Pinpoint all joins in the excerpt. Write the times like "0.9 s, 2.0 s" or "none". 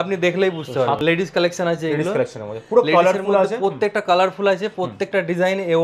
1.0 s